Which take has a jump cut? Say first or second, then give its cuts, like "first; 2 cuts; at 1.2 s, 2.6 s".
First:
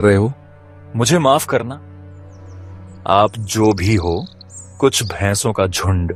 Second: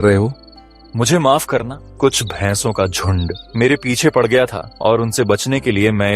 second; 3 cuts; at 1.8 s, 3.4 s, 4.7 s